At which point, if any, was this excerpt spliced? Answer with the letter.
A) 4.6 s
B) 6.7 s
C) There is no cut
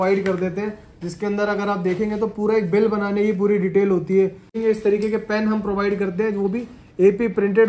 A